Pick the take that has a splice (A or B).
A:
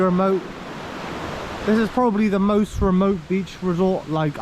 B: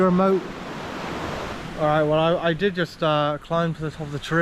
B